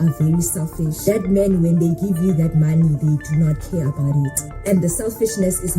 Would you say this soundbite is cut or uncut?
cut